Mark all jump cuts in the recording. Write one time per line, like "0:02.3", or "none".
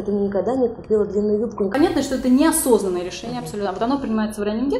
0:01.7